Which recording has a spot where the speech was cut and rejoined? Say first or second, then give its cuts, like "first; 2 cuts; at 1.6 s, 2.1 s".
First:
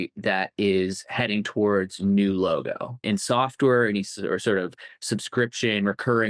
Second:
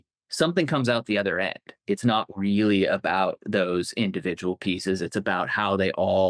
first; 1 cut; at 3.0 s